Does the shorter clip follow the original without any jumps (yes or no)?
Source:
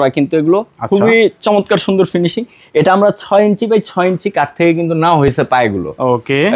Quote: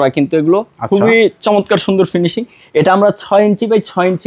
yes